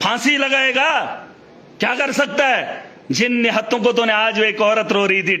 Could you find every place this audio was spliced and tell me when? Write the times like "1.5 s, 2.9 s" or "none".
none